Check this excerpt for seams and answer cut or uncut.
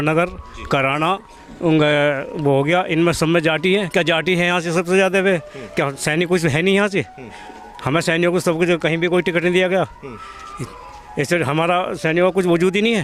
uncut